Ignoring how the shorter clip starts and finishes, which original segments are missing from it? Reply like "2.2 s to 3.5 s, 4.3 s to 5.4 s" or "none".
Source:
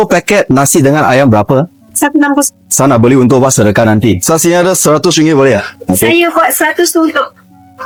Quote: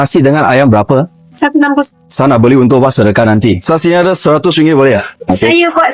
none